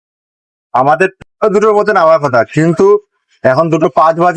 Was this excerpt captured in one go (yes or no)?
no